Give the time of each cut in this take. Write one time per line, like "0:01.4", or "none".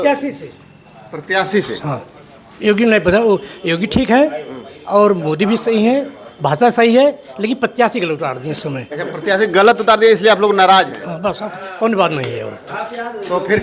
none

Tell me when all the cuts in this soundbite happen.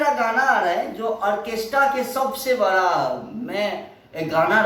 none

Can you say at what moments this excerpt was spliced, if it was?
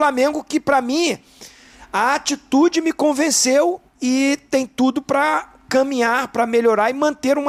none

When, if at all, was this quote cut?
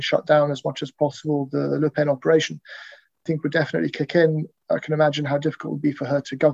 0:03.2

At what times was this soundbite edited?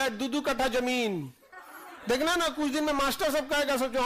none

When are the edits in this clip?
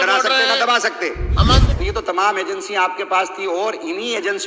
0:01.7

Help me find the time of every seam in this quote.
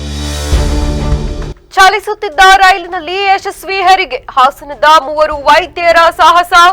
0:01.5

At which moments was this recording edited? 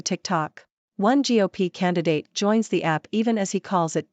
none

